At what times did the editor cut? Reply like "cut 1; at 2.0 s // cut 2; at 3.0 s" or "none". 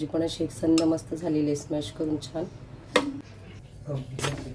cut 1; at 3.2 s